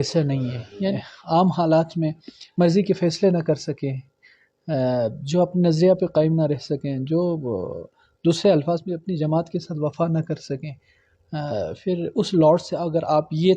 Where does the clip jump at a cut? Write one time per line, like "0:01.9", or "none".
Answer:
0:01.0